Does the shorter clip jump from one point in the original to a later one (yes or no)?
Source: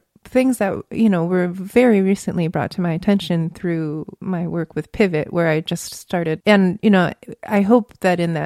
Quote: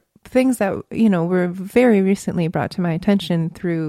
no